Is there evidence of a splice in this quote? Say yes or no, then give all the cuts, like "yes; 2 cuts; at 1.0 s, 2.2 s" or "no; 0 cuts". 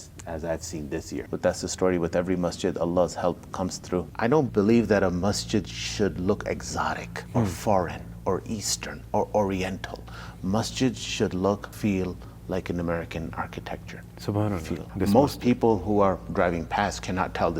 yes; 3 cuts; at 1.3 s, 4.1 s, 14.8 s